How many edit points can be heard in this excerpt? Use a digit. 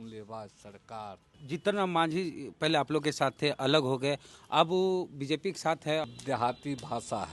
2